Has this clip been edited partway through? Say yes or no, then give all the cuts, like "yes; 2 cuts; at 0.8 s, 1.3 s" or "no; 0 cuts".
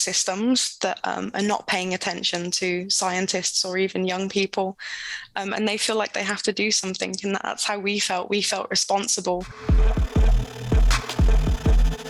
yes; 1 cut; at 9.5 s